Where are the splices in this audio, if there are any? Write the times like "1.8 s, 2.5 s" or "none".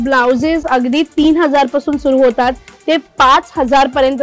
none